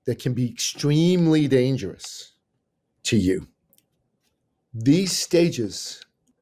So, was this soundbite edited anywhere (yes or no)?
no